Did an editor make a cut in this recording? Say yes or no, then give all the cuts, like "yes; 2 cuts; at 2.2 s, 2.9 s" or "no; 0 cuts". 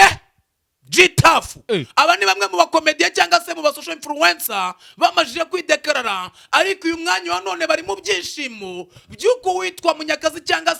no; 0 cuts